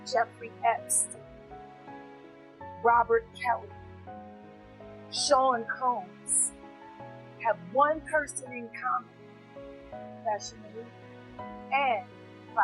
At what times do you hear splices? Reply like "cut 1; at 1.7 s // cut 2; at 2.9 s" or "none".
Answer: cut 1; at 0.8 s // cut 2; at 2.4 s

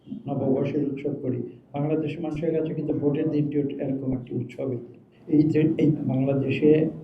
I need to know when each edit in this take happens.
cut 1; at 5.1 s

